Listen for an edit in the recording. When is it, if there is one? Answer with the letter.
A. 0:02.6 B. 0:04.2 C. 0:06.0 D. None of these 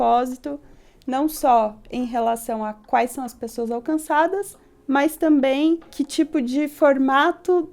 C